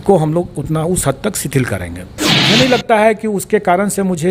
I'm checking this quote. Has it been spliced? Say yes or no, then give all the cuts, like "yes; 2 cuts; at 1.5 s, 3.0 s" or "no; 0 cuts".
yes; 1 cut; at 2.3 s